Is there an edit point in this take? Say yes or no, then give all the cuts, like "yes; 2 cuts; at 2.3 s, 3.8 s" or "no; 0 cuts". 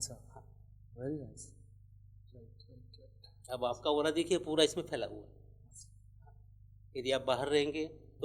no; 0 cuts